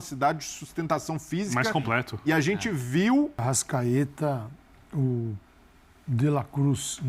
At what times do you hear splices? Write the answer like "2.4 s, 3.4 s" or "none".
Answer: 3.4 s